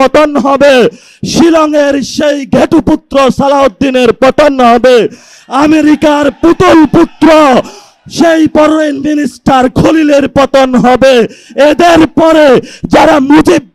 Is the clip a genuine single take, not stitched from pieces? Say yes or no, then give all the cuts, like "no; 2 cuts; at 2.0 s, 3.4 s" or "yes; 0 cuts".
yes; 0 cuts